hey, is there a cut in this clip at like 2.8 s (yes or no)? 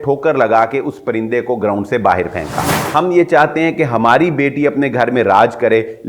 yes